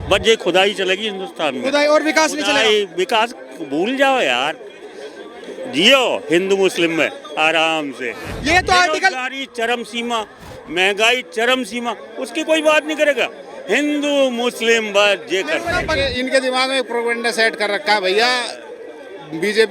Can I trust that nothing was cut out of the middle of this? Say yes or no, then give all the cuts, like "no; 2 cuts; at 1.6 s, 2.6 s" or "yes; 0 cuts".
no; 2 cuts; at 8.2 s, 15.7 s